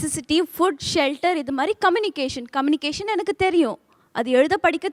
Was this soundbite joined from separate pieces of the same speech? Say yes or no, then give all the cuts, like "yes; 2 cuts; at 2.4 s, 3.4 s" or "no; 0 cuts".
no; 0 cuts